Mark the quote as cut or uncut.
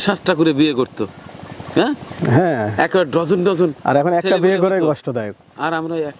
uncut